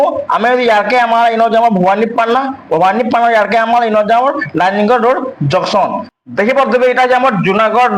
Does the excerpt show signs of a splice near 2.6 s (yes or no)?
no